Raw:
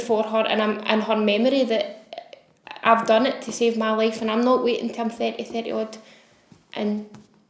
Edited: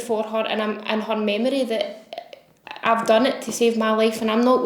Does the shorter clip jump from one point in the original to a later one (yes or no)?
no